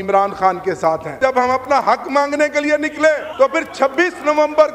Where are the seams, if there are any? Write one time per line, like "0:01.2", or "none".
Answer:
0:01.2
0:03.3